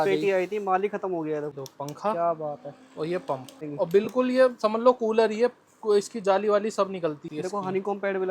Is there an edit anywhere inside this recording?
yes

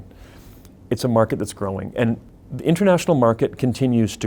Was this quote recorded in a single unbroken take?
no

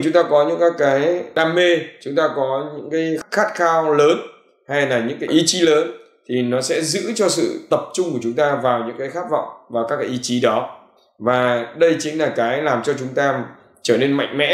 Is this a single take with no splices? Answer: no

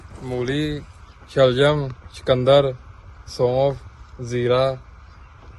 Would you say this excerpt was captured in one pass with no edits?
yes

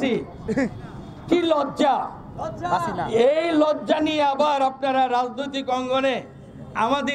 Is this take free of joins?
yes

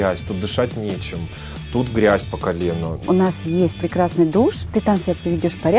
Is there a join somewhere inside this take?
yes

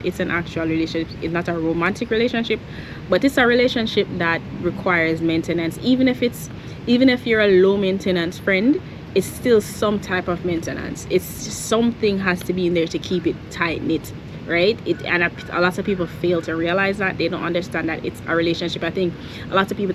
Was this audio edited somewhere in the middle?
no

